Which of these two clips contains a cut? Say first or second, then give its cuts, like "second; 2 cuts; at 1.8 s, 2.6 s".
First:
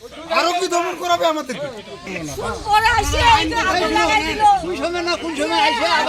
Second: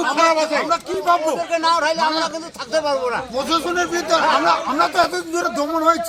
first; 1 cut; at 2.1 s